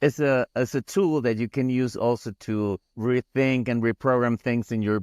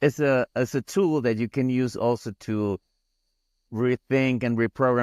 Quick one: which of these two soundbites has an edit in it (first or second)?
first